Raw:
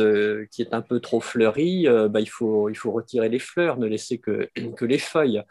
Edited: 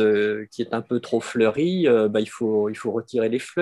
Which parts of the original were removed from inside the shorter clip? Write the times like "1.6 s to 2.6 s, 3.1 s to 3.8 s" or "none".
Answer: none